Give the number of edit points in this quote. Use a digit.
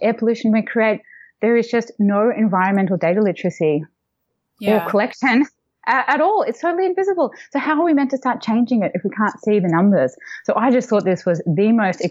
0